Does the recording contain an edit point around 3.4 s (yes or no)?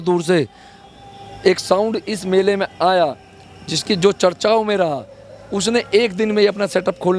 no